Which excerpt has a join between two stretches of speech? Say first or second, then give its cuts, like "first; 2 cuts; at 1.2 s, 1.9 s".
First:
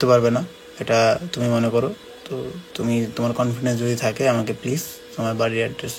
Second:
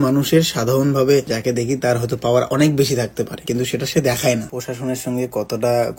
second; 1 cut; at 4.5 s